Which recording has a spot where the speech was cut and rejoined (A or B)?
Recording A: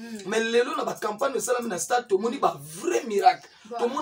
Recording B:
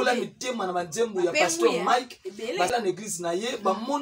B